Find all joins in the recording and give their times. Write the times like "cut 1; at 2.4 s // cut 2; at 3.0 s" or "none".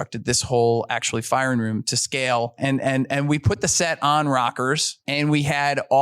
cut 1; at 2.6 s // cut 2; at 5.0 s